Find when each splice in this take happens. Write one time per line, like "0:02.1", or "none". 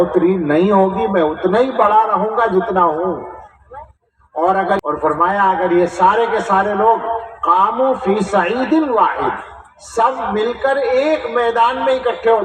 0:04.8